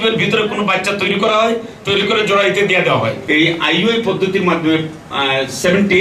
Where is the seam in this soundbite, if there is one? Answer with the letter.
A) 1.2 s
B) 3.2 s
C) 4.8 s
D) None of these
B